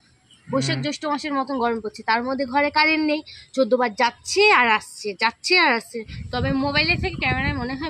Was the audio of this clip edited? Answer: yes; 1 cut; at 6.2 s

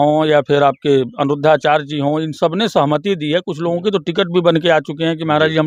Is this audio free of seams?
yes; 0 cuts

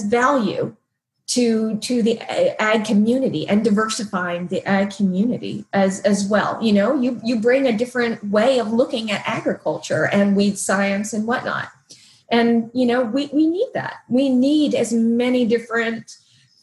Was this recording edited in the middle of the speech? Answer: no; 0 cuts

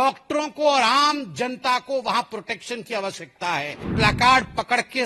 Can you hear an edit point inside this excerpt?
yes; 1 cut; at 3.9 s

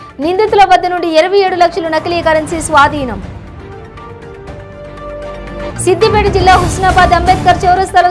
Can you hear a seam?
no; 0 cuts

